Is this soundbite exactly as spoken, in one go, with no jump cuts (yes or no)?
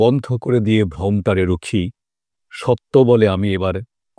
yes